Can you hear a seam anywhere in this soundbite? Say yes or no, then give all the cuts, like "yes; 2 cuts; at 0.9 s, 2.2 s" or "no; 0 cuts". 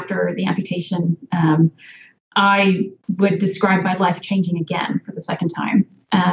no; 0 cuts